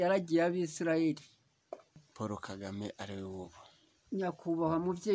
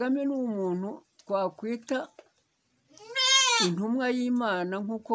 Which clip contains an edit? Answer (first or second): first